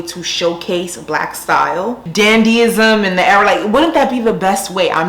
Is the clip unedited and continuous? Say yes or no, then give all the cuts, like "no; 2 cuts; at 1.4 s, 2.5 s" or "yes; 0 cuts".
no; 1 cut; at 2.0 s